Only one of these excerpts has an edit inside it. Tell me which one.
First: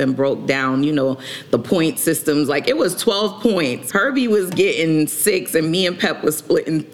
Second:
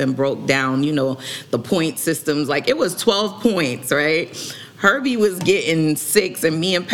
first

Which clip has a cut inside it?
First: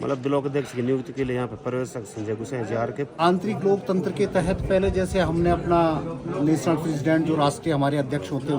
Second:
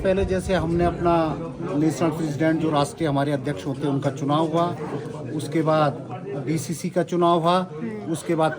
first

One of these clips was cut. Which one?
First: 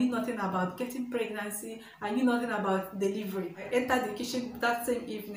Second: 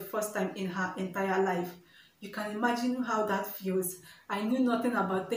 first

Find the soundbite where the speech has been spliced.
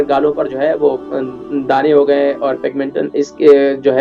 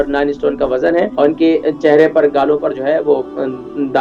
second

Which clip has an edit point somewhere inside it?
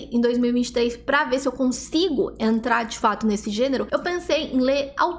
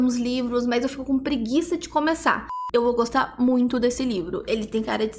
second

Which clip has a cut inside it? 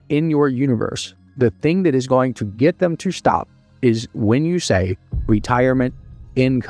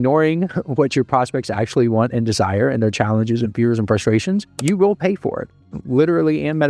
second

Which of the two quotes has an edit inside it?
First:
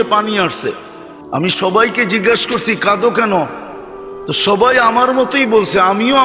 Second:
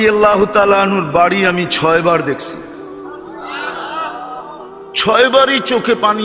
first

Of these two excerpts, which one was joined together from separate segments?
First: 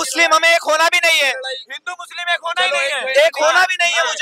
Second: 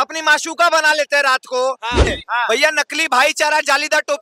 second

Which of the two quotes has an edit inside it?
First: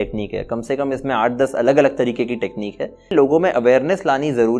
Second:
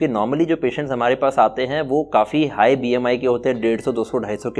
first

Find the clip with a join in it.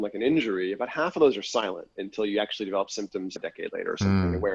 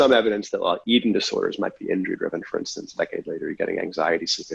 first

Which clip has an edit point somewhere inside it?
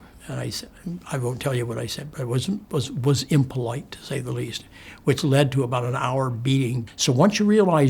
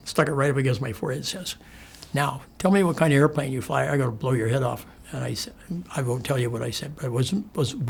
first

